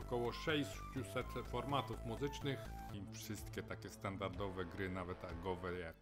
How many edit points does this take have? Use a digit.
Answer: 1